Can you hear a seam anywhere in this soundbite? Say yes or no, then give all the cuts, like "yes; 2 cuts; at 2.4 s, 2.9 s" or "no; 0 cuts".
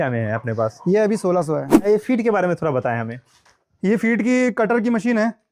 yes; 1 cut; at 1.8 s